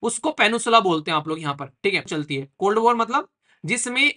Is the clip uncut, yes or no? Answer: no